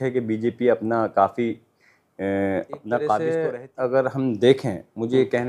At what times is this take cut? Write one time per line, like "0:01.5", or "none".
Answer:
0:03.2